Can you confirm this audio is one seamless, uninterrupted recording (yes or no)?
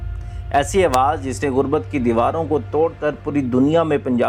yes